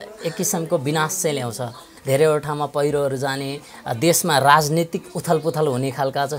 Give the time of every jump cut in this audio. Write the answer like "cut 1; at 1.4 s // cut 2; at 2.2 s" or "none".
cut 1; at 1.9 s